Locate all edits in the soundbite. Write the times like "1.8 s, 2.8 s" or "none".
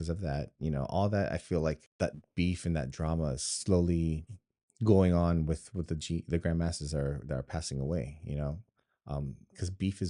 1.9 s